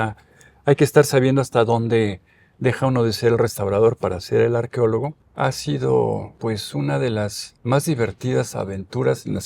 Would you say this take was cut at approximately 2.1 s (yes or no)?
no